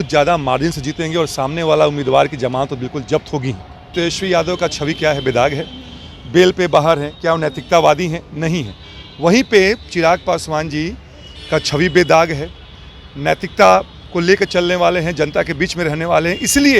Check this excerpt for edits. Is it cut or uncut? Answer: cut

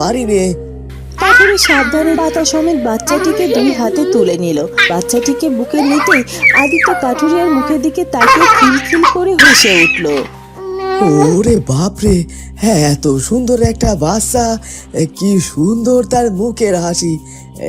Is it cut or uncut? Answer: uncut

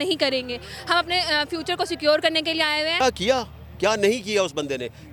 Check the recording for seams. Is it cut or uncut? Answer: cut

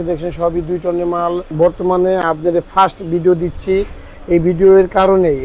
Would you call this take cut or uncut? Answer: cut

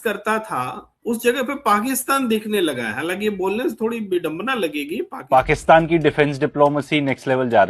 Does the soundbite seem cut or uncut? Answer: cut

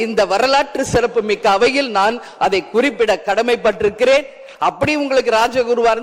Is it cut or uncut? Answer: uncut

